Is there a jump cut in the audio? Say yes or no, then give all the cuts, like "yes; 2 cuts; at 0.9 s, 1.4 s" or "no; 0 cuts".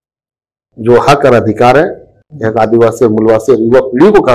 no; 0 cuts